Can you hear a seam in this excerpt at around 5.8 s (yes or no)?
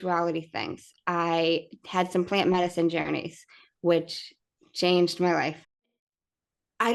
yes